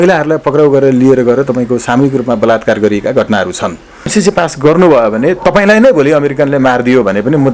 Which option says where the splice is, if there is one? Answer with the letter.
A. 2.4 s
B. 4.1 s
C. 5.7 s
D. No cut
B